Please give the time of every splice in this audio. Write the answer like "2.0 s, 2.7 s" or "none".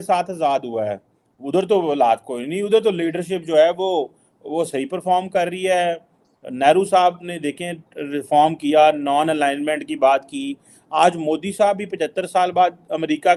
none